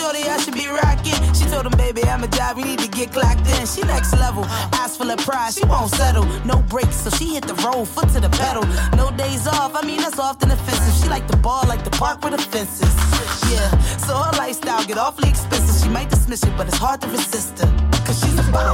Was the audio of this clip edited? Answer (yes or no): no